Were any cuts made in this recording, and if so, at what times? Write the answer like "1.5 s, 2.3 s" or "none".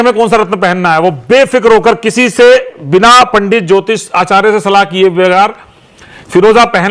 none